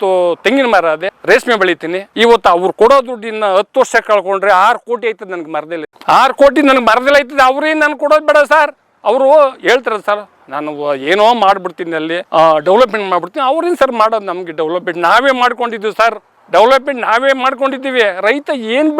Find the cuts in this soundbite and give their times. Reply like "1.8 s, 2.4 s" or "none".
none